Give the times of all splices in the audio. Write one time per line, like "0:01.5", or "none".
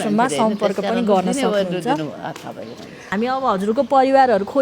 0:03.1

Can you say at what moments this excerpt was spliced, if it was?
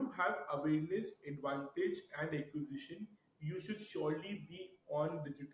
none

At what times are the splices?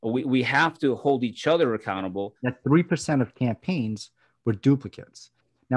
0:02.3

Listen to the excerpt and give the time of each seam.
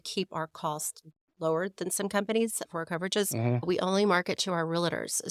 none

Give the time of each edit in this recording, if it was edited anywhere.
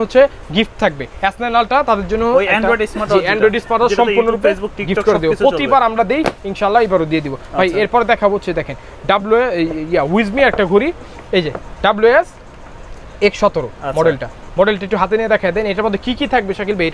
none

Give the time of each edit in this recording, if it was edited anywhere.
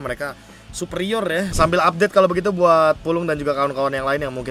0:01.5

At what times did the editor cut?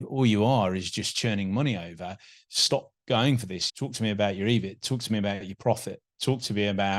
none

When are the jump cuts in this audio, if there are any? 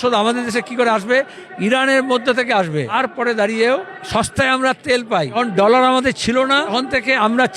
0:02.9
0:04.0
0:05.4
0:06.7

